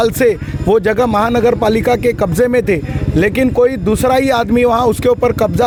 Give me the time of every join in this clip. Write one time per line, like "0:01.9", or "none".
none